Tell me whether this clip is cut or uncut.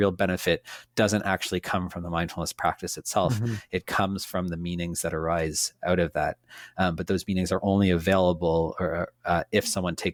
uncut